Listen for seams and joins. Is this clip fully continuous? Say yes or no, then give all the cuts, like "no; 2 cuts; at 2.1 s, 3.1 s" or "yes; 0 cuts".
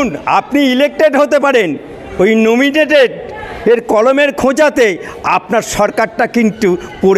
yes; 0 cuts